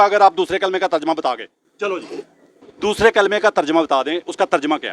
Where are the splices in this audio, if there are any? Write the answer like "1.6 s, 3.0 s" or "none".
2.6 s

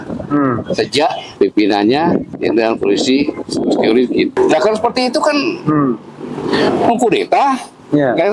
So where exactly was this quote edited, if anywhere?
1.2 s, 2.3 s, 4.3 s

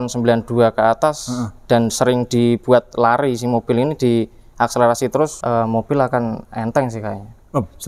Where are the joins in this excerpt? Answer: 5.4 s

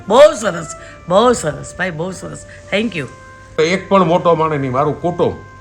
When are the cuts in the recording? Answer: 3.6 s

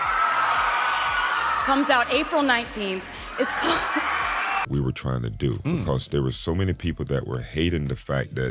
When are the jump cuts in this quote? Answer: 4.7 s

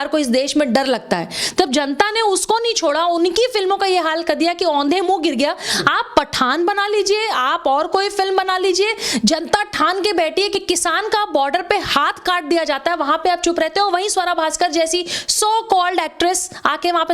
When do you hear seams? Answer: 10.5 s

